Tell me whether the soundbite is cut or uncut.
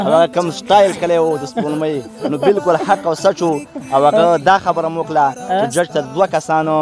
uncut